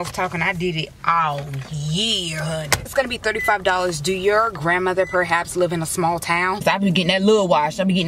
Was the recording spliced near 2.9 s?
yes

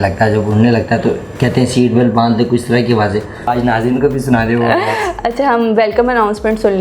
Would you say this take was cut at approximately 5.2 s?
no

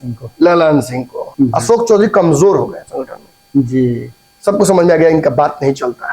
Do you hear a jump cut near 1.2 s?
yes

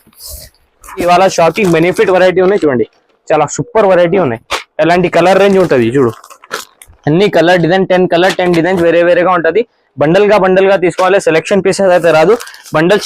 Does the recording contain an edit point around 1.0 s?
yes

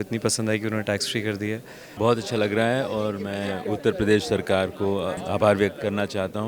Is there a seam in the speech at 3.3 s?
no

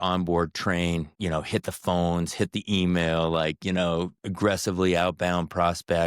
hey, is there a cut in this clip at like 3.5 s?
no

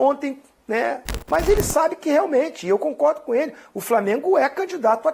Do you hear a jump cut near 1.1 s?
yes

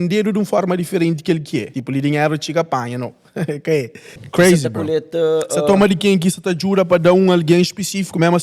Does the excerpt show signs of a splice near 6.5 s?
no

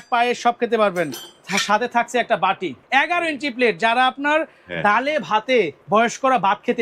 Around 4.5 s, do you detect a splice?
no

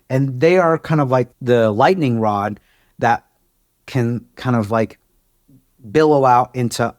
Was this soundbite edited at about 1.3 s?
yes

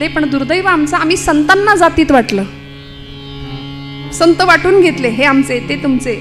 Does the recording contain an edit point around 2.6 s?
no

